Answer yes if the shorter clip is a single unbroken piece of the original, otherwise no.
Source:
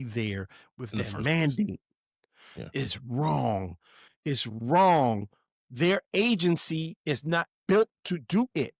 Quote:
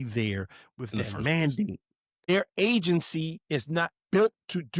no